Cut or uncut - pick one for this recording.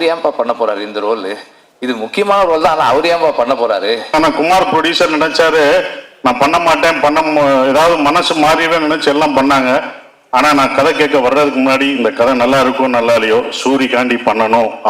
cut